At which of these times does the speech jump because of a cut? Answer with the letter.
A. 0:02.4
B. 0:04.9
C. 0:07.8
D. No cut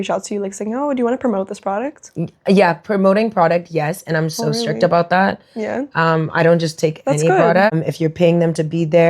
C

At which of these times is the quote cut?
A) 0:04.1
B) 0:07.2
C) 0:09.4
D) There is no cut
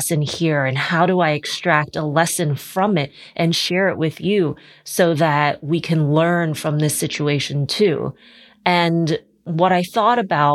C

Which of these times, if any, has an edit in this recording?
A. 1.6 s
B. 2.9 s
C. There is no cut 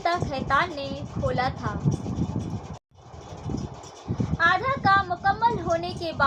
B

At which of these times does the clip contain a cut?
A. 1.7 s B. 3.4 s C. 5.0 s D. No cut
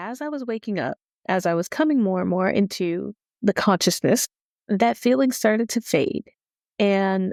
D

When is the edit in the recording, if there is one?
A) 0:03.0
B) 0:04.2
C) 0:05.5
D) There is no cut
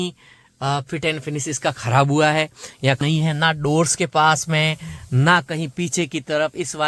A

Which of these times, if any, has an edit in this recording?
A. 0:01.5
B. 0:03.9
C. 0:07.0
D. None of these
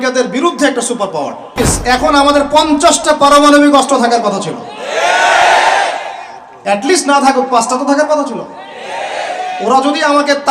A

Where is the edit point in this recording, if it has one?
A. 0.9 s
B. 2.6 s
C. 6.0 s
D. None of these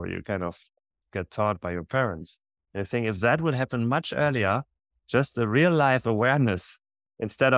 A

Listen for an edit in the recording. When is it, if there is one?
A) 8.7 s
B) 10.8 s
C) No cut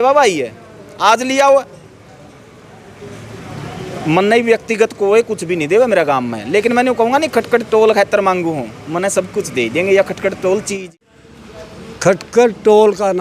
B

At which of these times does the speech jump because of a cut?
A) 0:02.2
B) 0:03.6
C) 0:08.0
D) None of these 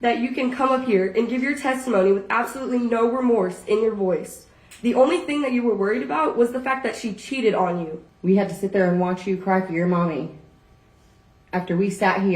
C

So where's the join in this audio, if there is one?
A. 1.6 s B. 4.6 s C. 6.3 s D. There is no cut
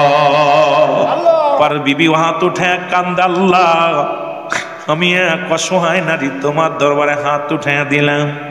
A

